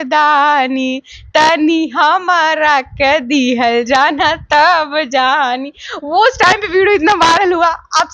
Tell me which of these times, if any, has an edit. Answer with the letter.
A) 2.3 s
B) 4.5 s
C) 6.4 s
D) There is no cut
D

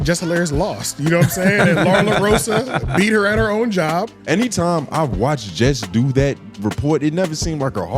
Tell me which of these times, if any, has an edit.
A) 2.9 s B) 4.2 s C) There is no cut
B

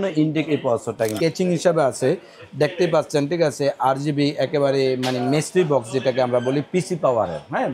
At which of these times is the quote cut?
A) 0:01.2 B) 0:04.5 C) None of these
A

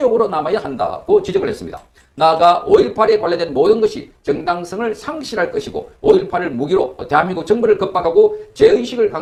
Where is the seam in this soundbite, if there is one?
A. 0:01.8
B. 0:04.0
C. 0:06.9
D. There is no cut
D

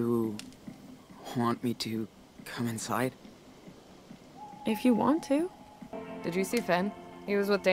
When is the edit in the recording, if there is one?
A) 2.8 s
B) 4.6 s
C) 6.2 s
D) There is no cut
C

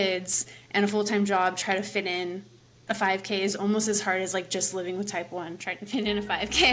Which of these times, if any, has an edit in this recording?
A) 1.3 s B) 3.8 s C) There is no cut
C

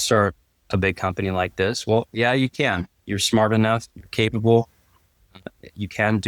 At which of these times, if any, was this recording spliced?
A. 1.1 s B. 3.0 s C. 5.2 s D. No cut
B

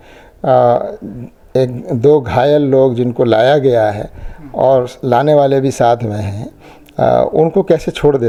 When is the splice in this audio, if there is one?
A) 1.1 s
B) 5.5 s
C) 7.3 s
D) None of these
D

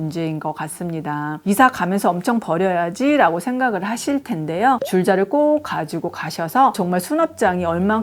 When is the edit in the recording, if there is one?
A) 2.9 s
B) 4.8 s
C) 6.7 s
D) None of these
B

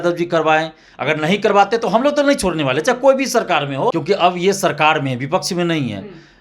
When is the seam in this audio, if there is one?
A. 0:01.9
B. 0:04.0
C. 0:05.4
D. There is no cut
B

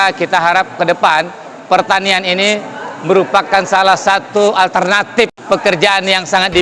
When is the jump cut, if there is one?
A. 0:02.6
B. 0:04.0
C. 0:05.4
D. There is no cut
C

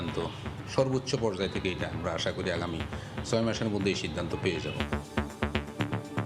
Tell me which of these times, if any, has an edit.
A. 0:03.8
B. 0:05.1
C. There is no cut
B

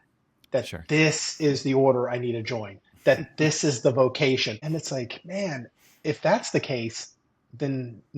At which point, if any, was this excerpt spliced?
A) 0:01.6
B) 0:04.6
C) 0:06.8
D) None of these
B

